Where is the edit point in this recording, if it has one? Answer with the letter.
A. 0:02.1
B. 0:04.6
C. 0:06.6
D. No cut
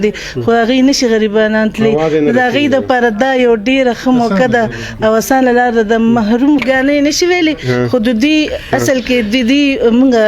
C